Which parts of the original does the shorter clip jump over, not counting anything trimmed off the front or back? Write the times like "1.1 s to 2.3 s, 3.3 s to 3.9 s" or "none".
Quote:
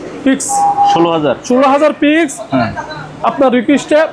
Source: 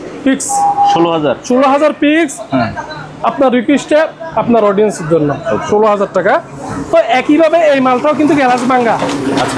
none